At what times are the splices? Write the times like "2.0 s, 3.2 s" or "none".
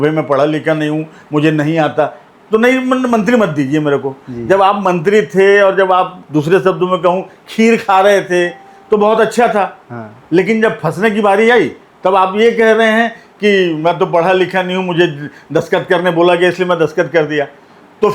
none